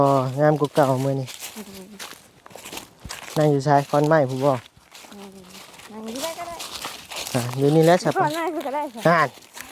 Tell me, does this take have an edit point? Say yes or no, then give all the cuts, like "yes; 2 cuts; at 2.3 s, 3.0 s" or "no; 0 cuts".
no; 0 cuts